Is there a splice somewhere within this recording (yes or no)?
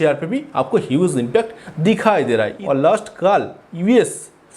yes